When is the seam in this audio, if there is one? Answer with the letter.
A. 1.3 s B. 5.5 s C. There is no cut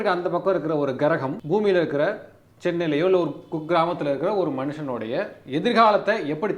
A